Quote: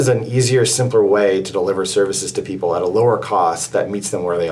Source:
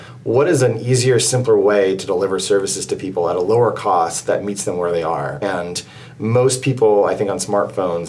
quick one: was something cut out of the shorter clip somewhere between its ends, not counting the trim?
no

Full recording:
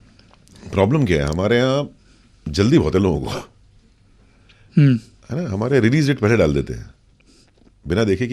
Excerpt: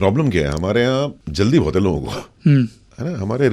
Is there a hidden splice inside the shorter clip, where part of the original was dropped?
yes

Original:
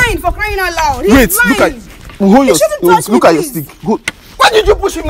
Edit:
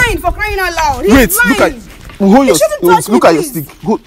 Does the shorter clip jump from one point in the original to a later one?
no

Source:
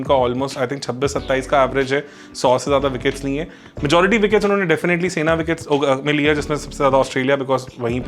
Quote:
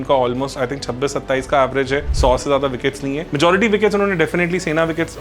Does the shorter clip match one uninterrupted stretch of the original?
no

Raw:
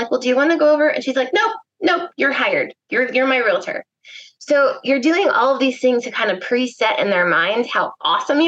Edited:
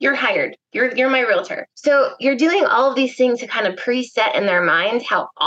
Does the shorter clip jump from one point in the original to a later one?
yes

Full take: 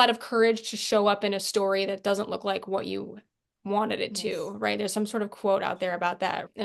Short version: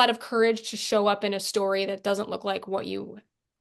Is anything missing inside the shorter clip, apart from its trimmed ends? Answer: no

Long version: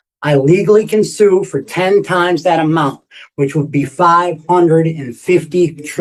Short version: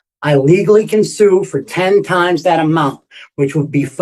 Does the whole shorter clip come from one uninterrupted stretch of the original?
yes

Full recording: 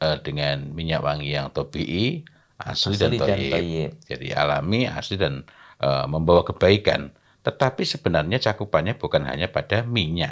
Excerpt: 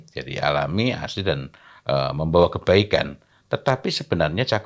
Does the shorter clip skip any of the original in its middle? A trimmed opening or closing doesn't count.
no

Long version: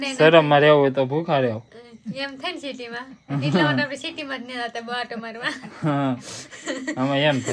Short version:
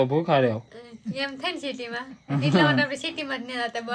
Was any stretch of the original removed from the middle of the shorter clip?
no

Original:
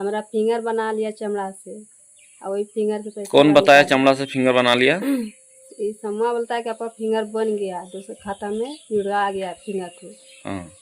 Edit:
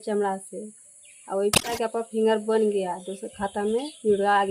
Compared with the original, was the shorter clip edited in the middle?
yes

